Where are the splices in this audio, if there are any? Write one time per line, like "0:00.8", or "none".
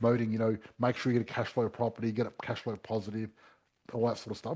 none